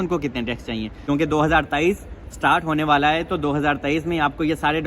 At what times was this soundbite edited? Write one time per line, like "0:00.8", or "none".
0:00.9